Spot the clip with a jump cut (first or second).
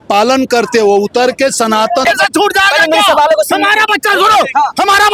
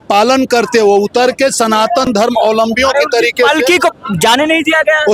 first